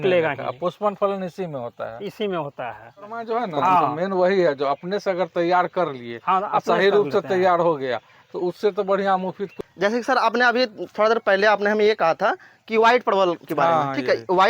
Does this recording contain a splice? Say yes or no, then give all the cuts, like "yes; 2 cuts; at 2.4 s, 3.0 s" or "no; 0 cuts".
yes; 2 cuts; at 3.2 s, 9.9 s